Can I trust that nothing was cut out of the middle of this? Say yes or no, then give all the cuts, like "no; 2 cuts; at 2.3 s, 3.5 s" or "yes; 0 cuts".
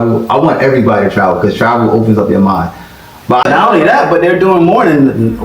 no; 1 cut; at 3.4 s